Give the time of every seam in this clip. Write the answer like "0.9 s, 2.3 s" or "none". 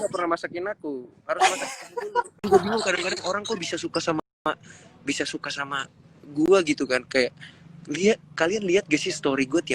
2.4 s